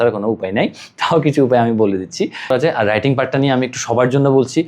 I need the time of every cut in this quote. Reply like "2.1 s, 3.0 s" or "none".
2.5 s

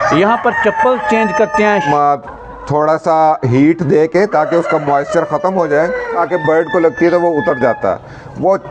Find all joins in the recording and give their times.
1.9 s, 6.2 s

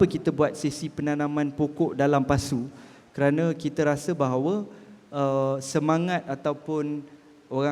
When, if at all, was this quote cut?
none

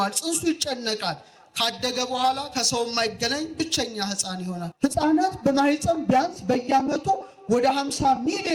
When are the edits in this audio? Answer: 4.6 s

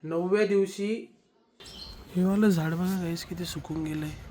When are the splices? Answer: 1.1 s

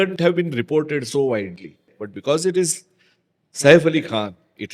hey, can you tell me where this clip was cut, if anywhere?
2.0 s

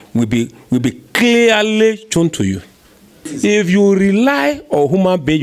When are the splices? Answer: 3.2 s

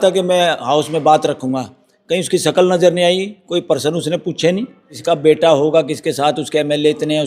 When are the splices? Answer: 4.9 s

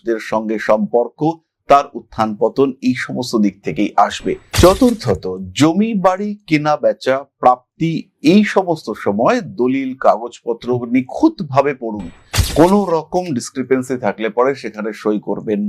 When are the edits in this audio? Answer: 4.5 s

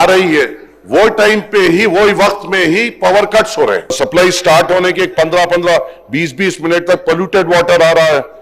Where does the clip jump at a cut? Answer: 3.9 s

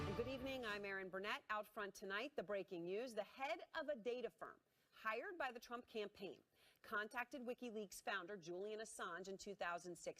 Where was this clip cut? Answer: 7.0 s

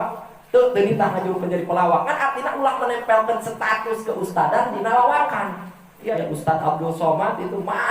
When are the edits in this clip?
6.0 s

